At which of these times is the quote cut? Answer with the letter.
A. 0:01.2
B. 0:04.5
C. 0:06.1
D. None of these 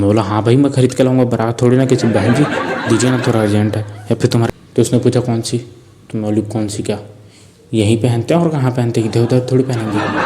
B